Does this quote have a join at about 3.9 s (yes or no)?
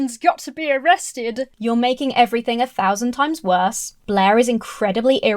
yes